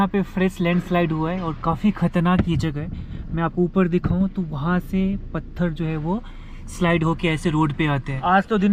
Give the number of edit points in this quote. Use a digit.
0